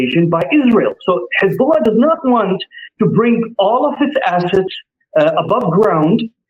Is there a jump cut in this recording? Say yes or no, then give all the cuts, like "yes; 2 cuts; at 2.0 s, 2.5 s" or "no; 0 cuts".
no; 0 cuts